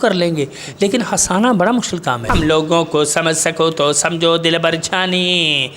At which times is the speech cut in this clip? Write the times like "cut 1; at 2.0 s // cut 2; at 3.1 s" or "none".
cut 1; at 2.2 s